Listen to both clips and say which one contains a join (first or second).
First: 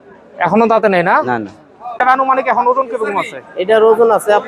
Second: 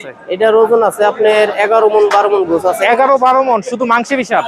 first